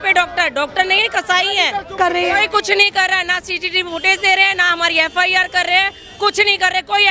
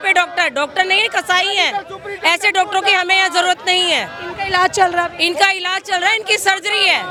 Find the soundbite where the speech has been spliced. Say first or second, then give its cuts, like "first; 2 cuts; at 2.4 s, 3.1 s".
first; 1 cut; at 2.0 s